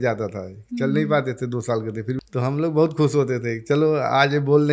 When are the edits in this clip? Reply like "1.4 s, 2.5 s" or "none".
2.1 s

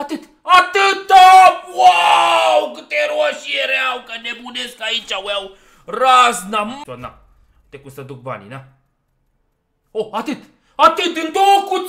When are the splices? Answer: 6.8 s

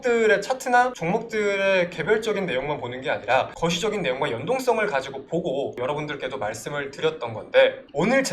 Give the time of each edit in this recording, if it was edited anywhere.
5.7 s

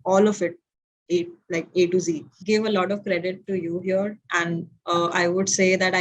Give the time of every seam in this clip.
2.3 s

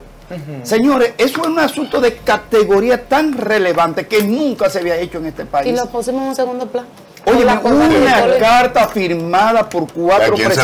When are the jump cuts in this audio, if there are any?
none

